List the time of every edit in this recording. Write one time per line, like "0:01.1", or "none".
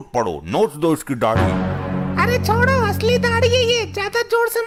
none